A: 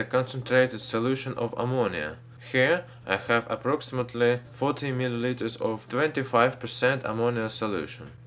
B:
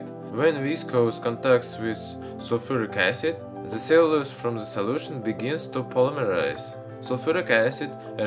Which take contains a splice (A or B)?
A